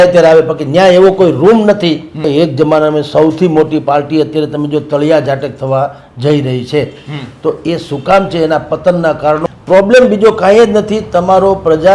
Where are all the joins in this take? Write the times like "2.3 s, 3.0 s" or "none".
2.3 s, 9.5 s